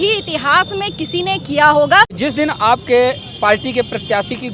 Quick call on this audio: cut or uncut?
cut